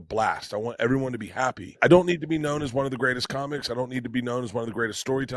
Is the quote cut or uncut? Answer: cut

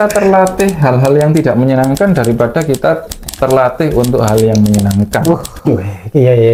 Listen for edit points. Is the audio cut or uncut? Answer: uncut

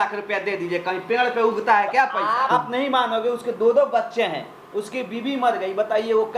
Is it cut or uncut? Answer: cut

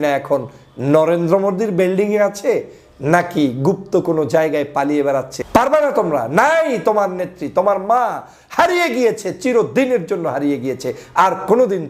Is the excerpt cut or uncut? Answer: cut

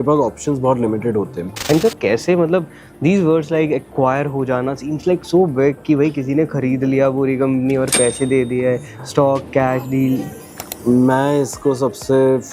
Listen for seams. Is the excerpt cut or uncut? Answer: cut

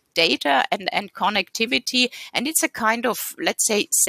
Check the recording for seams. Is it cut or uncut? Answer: uncut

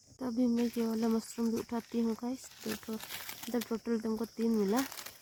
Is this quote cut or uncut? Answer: uncut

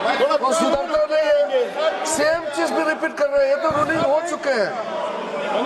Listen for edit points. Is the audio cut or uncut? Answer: uncut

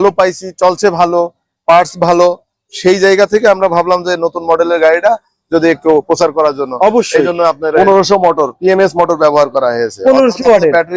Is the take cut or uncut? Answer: cut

